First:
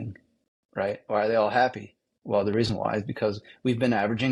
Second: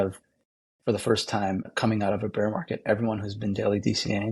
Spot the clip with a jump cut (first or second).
second